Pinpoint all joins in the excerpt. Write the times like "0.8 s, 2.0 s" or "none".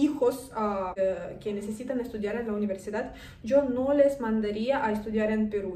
0.9 s